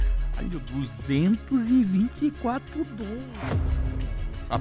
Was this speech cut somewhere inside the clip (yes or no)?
yes